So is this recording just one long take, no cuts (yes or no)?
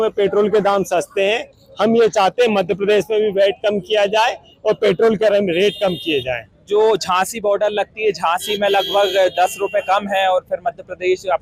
yes